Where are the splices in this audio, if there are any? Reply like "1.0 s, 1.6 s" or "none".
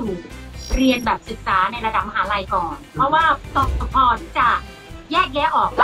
3.4 s